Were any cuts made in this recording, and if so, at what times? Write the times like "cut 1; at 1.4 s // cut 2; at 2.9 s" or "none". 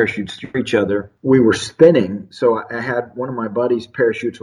cut 1; at 1.1 s

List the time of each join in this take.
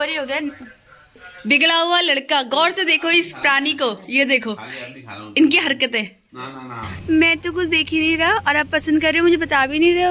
cut 1; at 1.3 s // cut 2; at 6.9 s

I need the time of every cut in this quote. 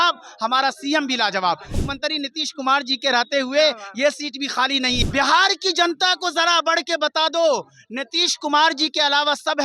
cut 1; at 1.7 s // cut 2; at 5.0 s

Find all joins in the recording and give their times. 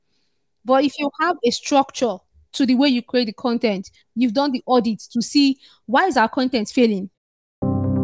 cut 1; at 7.1 s

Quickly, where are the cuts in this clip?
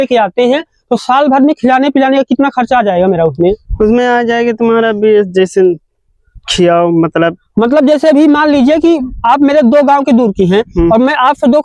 none

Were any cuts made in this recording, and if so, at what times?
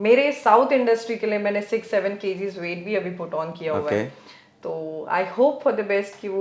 none

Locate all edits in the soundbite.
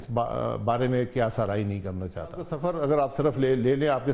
cut 1; at 2.5 s

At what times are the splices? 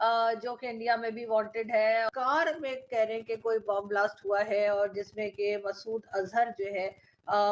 cut 1; at 2.1 s

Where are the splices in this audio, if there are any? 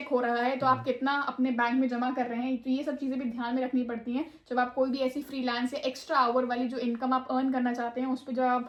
none

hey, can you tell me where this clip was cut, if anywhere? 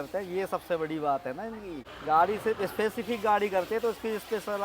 cut 1; at 1.8 s

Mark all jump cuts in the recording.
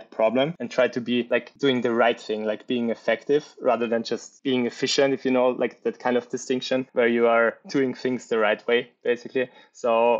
cut 1; at 7.6 s

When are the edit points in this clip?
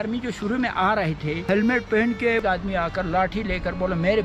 cut 1; at 1.4 s // cut 2; at 2.4 s

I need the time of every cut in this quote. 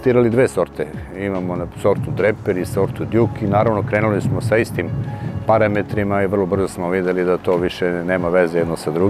none

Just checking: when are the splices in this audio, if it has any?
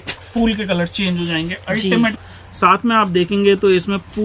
cut 1; at 2.2 s

